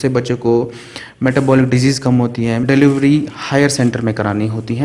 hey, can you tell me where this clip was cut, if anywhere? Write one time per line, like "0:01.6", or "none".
0:02.6